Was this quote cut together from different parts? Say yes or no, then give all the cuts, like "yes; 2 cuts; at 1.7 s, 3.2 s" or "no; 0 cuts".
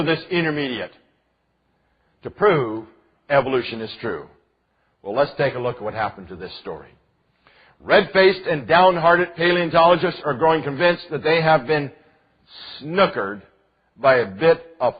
yes; 1 cut; at 10.0 s